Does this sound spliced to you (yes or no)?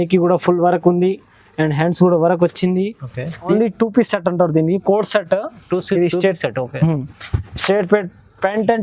yes